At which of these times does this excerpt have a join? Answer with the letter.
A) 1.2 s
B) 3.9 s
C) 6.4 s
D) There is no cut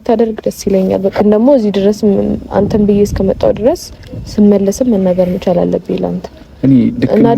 A